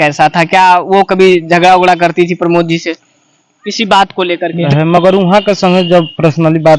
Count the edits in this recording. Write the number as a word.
one